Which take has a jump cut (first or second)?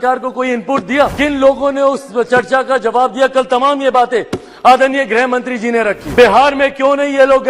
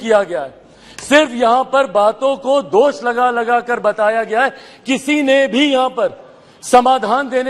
first